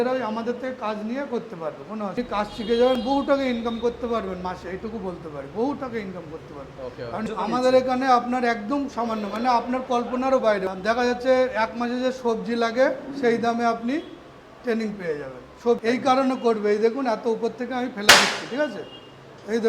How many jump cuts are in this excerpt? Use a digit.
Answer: 4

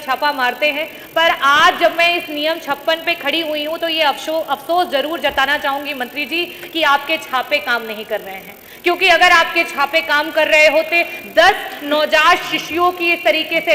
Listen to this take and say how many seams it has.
0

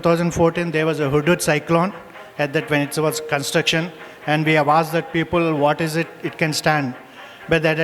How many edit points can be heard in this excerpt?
0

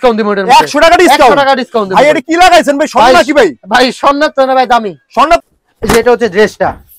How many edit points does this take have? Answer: 1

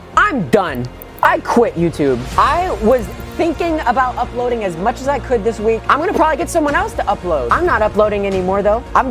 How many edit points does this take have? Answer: 1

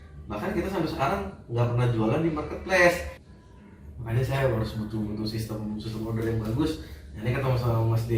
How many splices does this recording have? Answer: 1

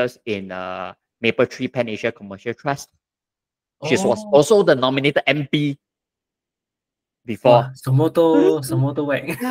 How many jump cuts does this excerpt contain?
0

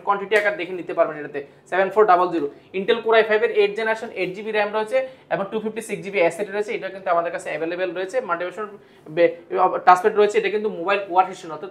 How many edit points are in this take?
0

